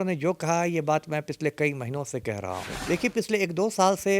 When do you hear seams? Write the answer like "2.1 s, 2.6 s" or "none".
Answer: 2.7 s